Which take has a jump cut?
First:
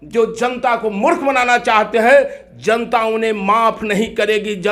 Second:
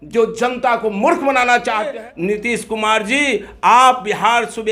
second; 1 cut; at 1.9 s

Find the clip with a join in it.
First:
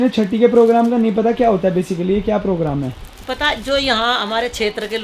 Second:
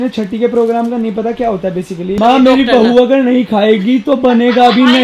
second; 1 cut; at 2.2 s

